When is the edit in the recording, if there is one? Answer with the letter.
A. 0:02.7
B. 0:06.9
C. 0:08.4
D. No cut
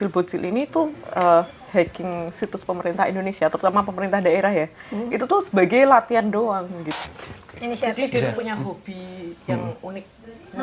B